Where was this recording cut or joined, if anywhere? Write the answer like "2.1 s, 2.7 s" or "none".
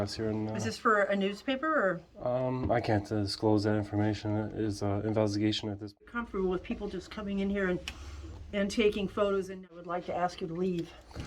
6.0 s, 9.8 s